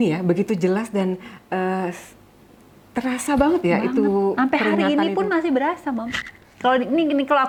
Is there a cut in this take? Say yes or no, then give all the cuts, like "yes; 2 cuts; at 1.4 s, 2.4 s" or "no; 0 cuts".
no; 0 cuts